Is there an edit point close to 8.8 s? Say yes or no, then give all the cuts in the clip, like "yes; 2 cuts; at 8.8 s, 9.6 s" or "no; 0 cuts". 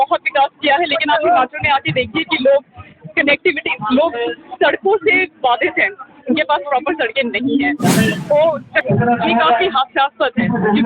yes; 1 cut; at 8.8 s